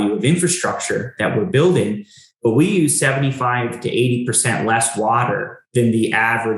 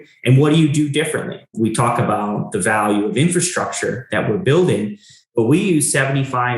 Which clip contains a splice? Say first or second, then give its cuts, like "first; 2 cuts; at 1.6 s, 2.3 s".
second; 1 cut; at 1.5 s